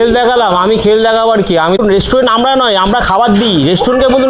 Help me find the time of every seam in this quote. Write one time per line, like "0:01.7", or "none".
0:01.8